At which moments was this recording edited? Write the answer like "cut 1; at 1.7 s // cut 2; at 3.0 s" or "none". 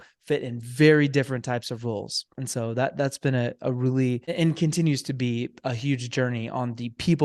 cut 1; at 4.3 s